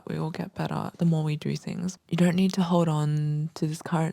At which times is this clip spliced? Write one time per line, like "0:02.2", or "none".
0:00.9
0:02.0